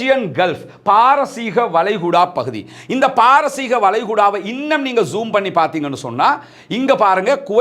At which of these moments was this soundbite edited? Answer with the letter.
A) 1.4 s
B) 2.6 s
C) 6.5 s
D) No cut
D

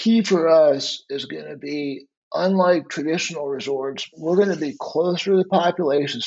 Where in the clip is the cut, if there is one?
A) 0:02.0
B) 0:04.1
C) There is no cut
B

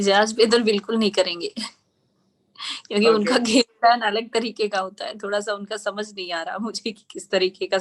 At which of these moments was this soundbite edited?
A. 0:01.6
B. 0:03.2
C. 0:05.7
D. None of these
D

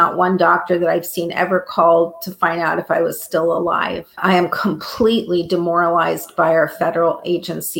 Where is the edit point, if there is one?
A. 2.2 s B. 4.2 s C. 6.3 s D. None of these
B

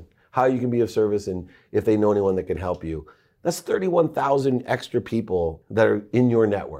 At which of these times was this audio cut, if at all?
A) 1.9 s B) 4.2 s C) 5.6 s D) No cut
C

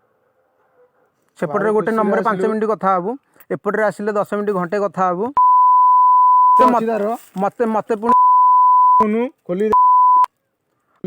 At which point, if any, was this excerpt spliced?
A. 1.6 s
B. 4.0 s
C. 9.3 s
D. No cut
D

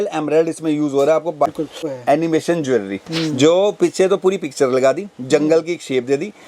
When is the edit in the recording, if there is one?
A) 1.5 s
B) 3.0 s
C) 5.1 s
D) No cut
A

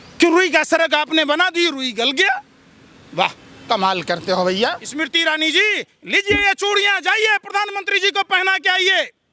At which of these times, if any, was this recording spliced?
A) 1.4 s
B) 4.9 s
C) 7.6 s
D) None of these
B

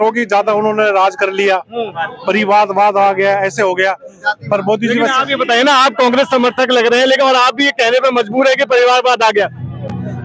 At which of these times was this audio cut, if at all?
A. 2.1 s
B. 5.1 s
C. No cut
A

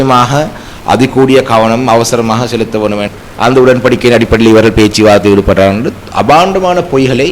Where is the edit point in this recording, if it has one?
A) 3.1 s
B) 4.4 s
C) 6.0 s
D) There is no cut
A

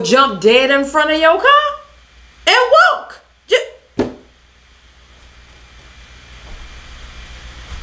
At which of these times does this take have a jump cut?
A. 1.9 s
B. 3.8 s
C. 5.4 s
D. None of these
D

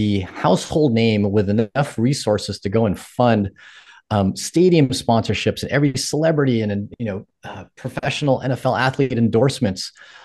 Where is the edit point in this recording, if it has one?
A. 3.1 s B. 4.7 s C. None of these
C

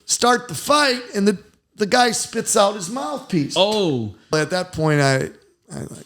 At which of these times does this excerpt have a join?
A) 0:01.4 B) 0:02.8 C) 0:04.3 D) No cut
C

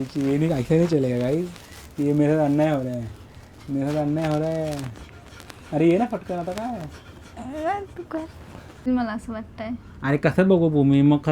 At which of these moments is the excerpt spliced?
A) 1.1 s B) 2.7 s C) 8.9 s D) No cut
C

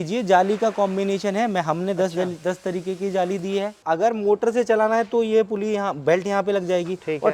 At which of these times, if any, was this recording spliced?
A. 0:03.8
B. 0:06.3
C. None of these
A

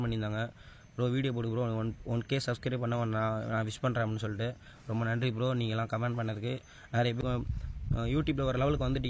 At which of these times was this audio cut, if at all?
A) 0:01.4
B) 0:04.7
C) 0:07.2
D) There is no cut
C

